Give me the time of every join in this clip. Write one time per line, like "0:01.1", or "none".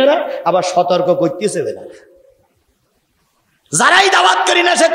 none